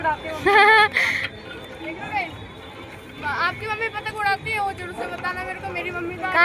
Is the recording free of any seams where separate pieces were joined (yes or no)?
yes